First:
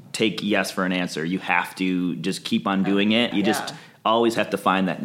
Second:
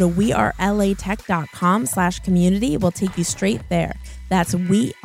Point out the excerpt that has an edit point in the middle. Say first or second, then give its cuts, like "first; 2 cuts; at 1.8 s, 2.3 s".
first; 1 cut; at 3.3 s